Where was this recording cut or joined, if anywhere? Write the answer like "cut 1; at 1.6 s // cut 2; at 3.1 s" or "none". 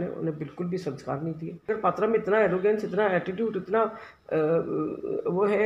cut 1; at 1.7 s